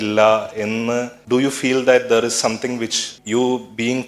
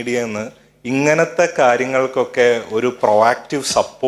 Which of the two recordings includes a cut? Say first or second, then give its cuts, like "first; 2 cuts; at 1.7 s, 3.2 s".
first; 2 cuts; at 1.1 s, 3.1 s